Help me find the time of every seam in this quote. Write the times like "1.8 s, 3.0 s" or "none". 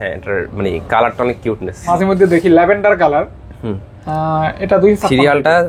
1.8 s